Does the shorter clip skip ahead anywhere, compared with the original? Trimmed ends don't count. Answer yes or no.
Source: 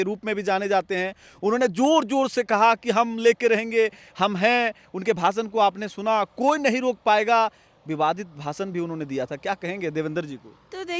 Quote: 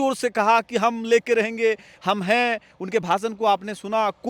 no